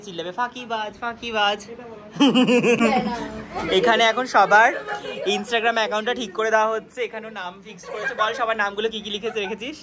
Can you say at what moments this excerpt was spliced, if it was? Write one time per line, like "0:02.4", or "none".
0:02.8